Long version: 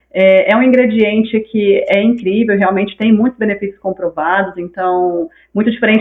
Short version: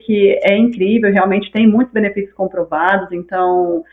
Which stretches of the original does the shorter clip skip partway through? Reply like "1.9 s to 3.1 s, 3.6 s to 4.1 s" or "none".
none